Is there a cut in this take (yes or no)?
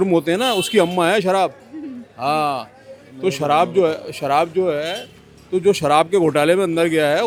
no